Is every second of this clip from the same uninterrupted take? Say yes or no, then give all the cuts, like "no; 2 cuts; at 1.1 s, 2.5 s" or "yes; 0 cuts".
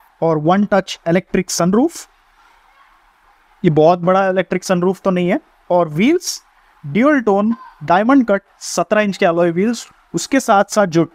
no; 3 cuts; at 3.2 s, 5.5 s, 9.9 s